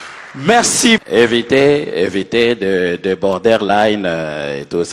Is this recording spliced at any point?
yes; 1 cut; at 1.0 s

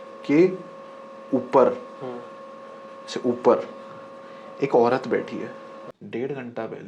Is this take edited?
yes; 1 cut; at 6.0 s

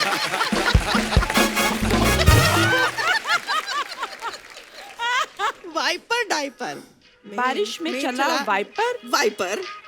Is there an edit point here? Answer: yes; 1 cut; at 3.0 s

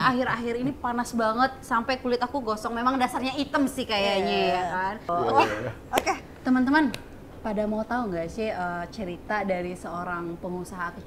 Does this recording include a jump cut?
yes; 1 cut; at 5.1 s

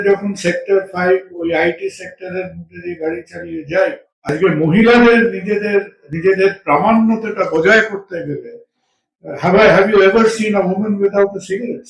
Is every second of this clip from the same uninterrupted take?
no; 1 cut; at 4.3 s

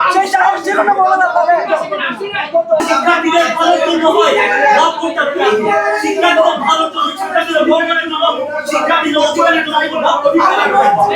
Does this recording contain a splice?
yes; 1 cut; at 2.8 s

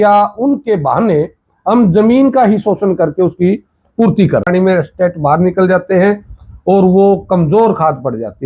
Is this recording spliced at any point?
yes; 1 cut; at 4.5 s

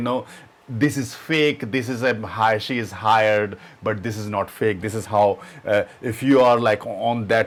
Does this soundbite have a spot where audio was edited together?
no; 0 cuts

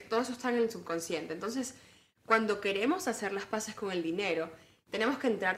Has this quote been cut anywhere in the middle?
no; 0 cuts

